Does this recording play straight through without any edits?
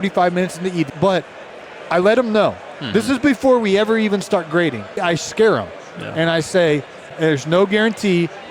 no; 3 cuts; at 0.9 s, 5.0 s, 7.1 s

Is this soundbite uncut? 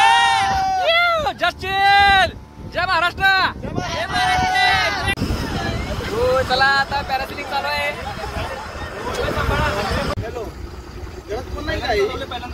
no; 2 cuts; at 5.2 s, 10.2 s

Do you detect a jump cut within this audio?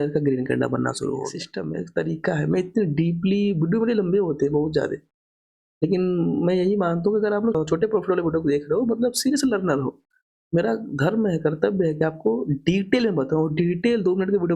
yes; 2 cuts; at 1.5 s, 7.6 s

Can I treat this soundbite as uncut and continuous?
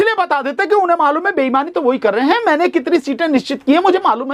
yes; 0 cuts

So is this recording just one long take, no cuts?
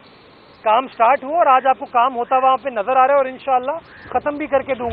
yes; 0 cuts

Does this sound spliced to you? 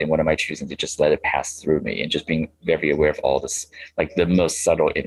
no; 0 cuts

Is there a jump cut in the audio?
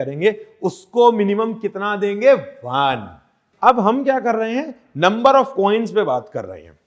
yes; 1 cut; at 3.4 s

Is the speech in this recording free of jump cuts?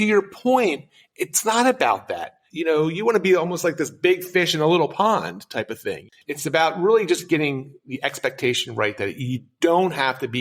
no; 1 cut; at 6.1 s

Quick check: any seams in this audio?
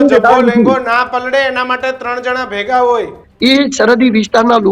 yes; 1 cut; at 3.2 s

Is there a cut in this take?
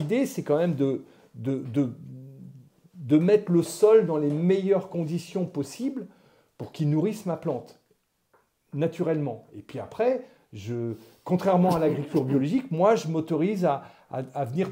no; 0 cuts

